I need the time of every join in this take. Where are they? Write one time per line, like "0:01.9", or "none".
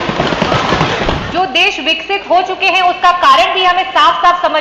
0:01.2